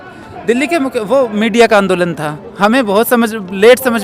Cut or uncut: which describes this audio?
uncut